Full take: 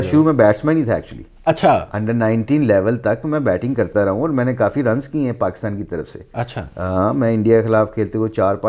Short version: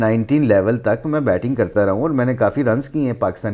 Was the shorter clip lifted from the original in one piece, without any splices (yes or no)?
yes